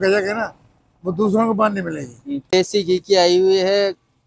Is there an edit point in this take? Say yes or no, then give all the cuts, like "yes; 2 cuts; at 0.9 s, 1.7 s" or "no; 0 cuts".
yes; 1 cut; at 2.5 s